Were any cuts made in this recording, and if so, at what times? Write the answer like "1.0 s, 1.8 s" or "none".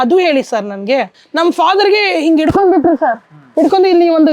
1.2 s